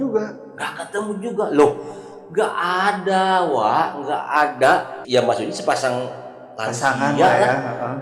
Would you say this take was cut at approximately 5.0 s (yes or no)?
yes